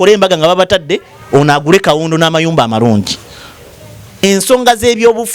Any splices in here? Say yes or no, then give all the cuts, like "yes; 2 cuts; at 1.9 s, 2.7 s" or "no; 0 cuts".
yes; 1 cut; at 4.2 s